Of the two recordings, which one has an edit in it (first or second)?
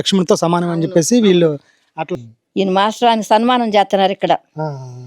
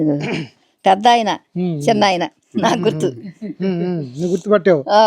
first